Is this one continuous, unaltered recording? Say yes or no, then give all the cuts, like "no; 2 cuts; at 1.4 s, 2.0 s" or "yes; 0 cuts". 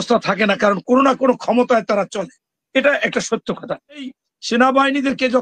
no; 1 cut; at 4.1 s